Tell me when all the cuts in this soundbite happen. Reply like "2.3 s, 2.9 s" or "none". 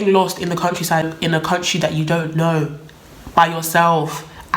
1.1 s

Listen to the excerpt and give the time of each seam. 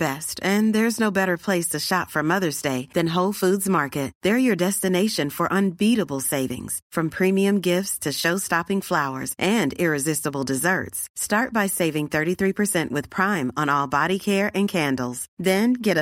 none

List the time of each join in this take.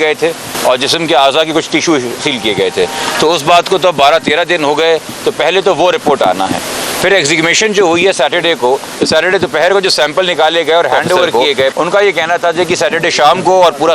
11.7 s

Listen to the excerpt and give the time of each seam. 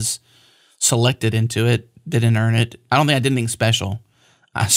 2.8 s

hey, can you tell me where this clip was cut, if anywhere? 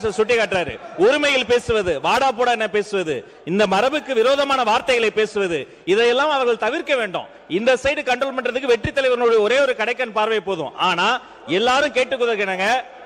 none

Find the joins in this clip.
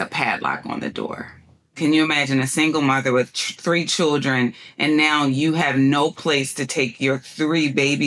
1.8 s

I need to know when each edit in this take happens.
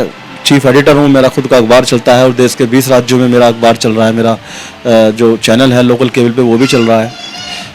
none

